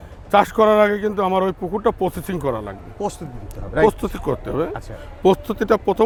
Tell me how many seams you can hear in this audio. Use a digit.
0